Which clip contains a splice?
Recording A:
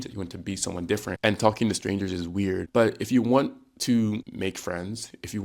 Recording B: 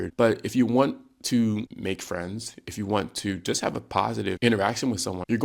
A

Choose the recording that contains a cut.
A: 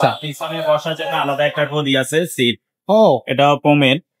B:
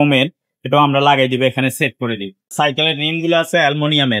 B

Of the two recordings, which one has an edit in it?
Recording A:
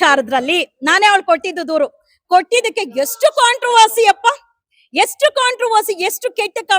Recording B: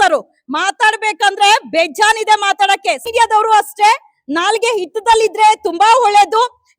B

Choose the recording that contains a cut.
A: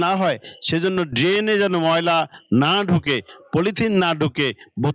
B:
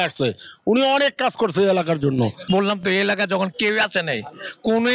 B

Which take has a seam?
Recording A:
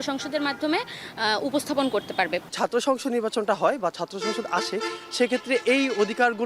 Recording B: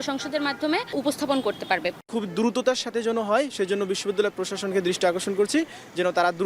B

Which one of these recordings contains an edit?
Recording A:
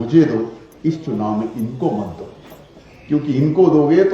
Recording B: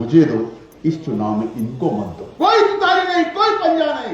B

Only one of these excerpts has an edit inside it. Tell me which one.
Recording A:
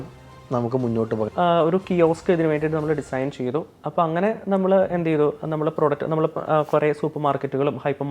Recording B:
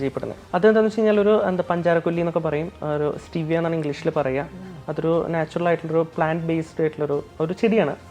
A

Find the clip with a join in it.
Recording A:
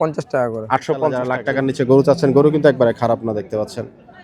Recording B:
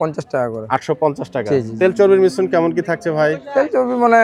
A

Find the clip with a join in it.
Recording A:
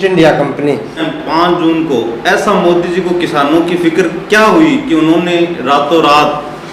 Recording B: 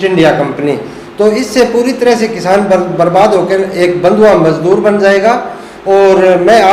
A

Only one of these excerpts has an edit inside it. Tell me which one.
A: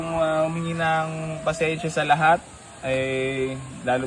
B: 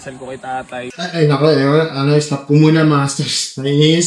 B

